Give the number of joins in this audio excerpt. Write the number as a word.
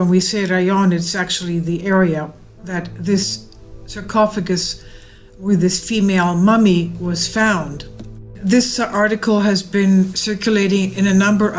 zero